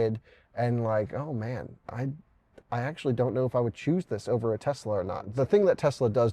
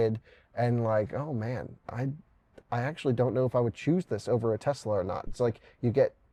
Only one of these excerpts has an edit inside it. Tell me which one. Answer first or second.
first